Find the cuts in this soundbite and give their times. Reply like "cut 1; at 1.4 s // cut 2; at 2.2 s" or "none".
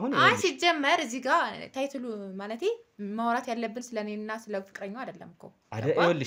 none

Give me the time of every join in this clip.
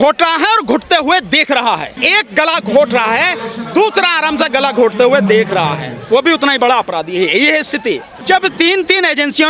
cut 1; at 2.0 s // cut 2; at 8.2 s

